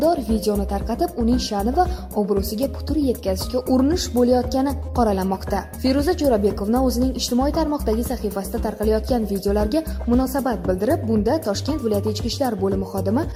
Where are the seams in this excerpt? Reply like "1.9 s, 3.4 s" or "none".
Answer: none